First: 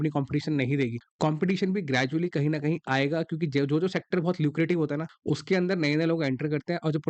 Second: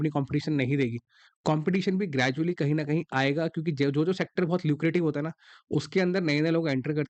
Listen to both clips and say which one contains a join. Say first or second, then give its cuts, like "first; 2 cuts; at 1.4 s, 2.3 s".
first; 2 cuts; at 1.0 s, 5.1 s